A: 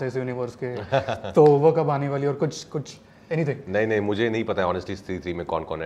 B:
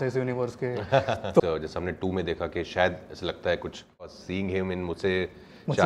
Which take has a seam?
B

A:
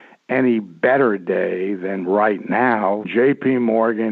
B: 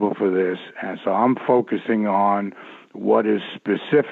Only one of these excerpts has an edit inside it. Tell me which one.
A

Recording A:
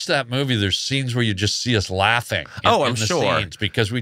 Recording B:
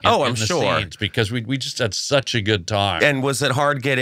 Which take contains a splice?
B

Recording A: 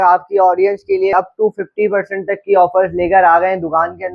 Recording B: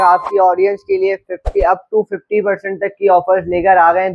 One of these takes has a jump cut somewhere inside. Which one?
A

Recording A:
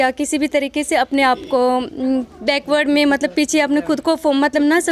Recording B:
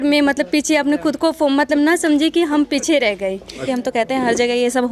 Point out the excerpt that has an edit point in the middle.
B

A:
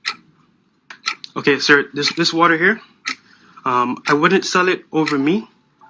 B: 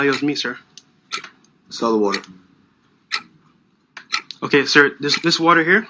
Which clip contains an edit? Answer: A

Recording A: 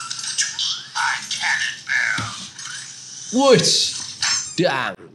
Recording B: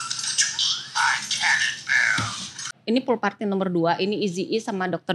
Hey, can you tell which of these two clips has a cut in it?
B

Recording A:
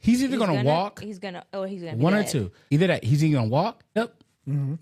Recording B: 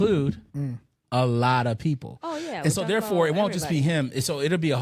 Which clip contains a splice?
A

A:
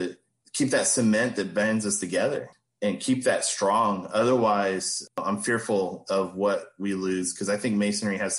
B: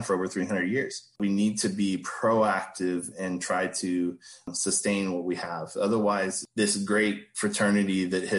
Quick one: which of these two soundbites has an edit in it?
B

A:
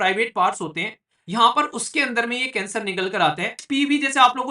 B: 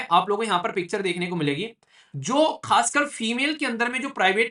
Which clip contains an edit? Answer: A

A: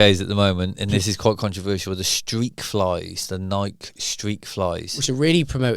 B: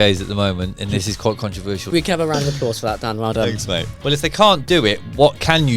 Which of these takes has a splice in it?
B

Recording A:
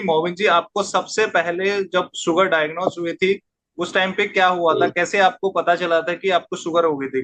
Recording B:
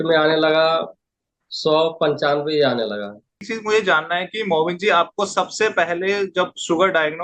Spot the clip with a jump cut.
B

